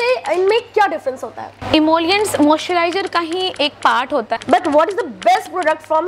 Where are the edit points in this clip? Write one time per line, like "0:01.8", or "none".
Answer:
0:04.4